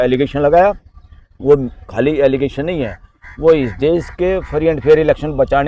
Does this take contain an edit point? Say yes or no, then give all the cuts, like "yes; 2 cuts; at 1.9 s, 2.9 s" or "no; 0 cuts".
no; 0 cuts